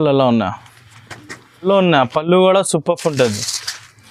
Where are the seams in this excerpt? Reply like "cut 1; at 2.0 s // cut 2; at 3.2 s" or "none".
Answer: cut 1; at 1.5 s